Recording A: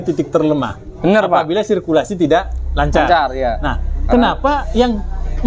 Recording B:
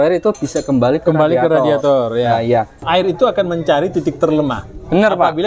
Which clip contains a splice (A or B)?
B